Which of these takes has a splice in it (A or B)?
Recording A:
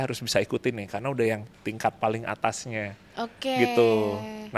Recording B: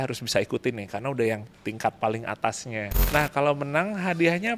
B